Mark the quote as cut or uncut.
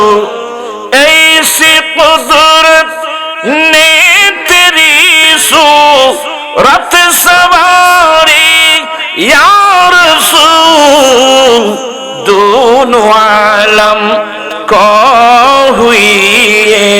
uncut